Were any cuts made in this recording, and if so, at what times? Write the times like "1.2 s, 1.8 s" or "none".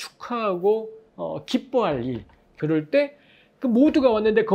2.4 s